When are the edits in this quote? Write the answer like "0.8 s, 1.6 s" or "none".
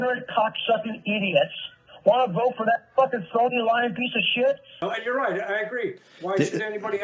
4.7 s